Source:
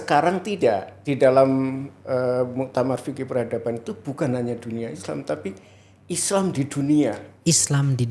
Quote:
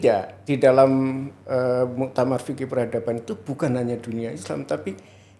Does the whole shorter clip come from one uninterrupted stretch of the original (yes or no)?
yes